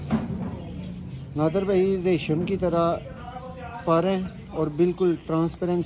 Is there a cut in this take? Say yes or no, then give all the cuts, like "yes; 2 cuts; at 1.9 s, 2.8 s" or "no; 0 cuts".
no; 0 cuts